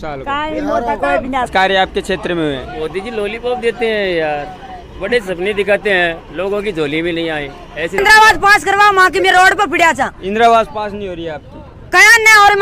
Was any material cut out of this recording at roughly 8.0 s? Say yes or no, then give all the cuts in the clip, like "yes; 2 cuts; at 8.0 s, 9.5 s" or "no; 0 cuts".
yes; 2 cuts; at 1.5 s, 8.0 s